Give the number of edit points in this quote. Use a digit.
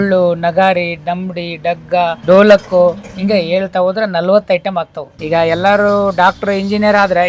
1